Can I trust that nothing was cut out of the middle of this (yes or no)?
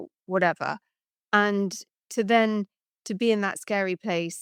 yes